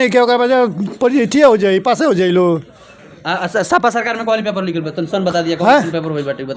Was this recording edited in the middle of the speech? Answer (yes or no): no